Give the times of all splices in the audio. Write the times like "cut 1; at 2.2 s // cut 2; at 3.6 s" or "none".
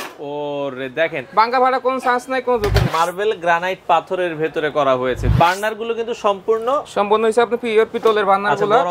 cut 1; at 2.9 s // cut 2; at 5.3 s